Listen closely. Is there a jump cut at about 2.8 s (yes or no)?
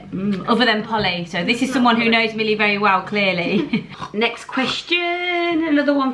no